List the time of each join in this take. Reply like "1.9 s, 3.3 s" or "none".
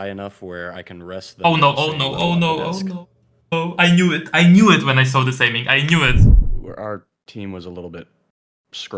6.3 s